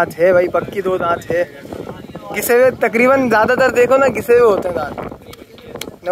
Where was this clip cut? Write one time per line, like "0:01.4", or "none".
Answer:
none